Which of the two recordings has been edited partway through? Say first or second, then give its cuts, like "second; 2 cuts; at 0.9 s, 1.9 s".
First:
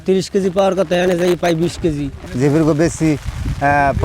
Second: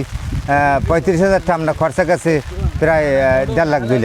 first; 1 cut; at 2.2 s